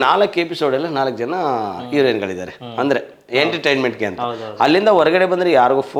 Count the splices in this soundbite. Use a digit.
0